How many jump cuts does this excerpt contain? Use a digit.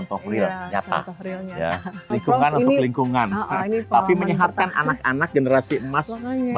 1